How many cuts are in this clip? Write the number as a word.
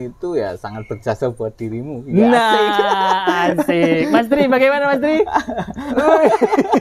zero